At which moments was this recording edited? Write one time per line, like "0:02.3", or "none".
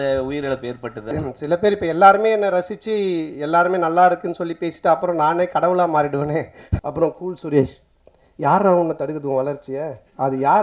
0:01.1
0:06.7